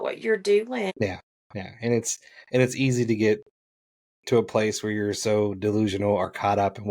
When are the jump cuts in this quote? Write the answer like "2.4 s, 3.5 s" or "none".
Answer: 0.9 s